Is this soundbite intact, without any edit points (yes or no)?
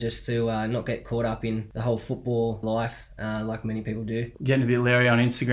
no